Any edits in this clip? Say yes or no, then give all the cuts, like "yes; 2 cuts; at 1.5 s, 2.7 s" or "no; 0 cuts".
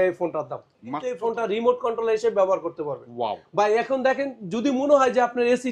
yes; 1 cut; at 1.1 s